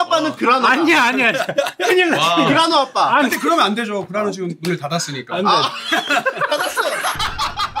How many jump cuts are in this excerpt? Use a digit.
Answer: 0